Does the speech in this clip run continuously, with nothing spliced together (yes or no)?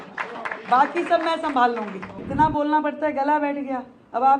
no